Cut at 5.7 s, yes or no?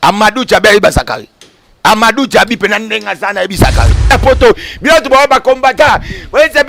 no